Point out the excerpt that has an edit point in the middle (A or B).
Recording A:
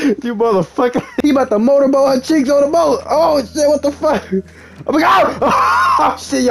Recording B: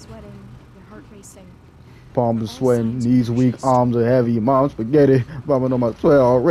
A